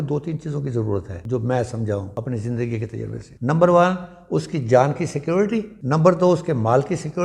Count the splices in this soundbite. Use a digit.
4